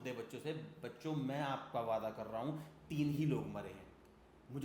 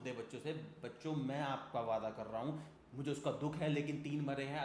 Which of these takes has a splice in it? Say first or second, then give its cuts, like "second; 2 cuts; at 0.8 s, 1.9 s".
second; 1 cut; at 2.7 s